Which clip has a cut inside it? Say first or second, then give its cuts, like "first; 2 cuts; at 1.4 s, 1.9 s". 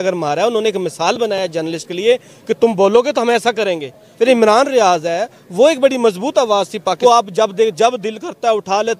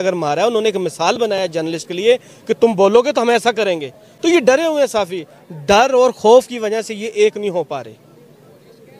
first; 2 cuts; at 4.0 s, 7.0 s